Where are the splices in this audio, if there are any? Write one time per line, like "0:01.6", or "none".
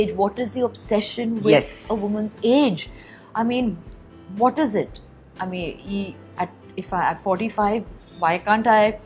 none